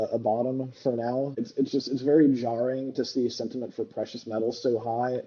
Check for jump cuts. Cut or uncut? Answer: cut